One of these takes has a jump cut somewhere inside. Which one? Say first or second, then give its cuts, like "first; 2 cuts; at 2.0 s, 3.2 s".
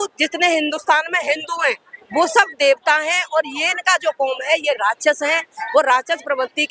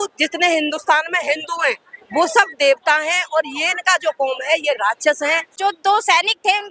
second; 1 cut; at 5.5 s